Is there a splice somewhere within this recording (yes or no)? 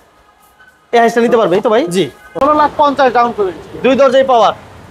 yes